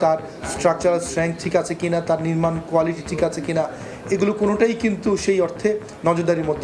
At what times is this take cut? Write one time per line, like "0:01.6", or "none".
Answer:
none